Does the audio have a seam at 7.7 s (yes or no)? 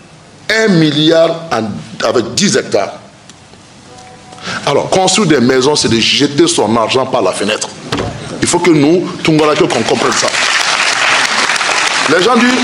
no